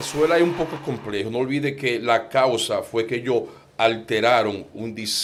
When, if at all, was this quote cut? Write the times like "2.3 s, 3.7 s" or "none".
none